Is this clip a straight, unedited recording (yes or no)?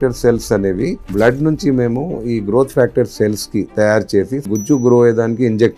no